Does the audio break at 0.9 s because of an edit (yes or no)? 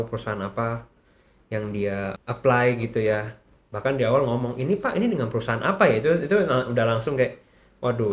no